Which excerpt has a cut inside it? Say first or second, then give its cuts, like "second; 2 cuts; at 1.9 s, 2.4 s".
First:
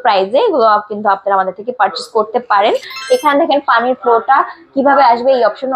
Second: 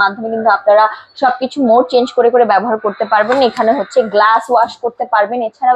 first; 1 cut; at 2.9 s